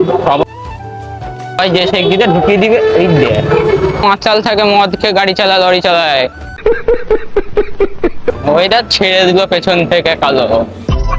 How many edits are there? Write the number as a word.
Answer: two